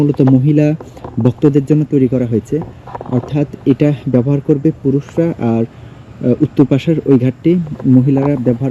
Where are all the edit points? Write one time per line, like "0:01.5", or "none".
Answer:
none